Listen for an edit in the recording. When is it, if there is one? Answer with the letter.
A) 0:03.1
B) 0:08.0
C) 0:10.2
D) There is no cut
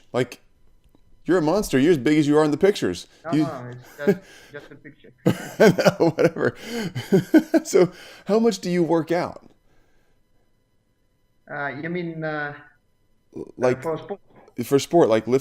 C